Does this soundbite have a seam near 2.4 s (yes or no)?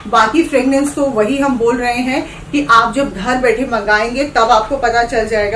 no